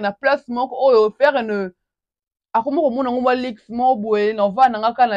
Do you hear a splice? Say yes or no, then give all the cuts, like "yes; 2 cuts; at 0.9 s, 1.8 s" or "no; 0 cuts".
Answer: no; 0 cuts